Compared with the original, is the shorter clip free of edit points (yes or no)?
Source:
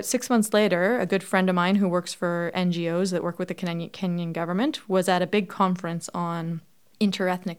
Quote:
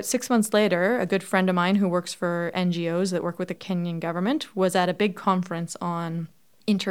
no